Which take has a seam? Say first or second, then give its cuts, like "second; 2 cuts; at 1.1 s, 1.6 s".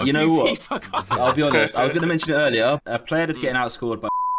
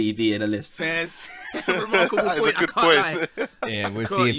first; 1 cut; at 2.8 s